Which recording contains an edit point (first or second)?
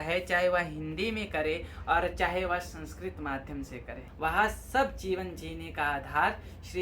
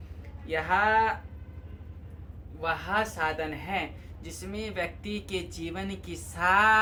first